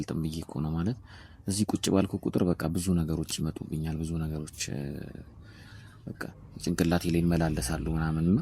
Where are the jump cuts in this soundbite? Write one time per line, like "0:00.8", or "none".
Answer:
none